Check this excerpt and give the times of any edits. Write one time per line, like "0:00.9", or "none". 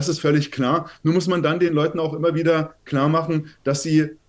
none